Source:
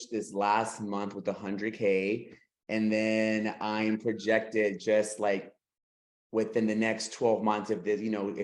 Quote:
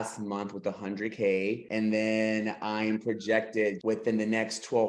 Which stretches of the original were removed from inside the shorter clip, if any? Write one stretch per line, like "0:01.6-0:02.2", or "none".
0:02.3-0:02.6
0:04.8-0:06.3